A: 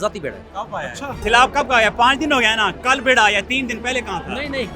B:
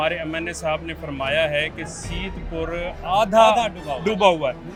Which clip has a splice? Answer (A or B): A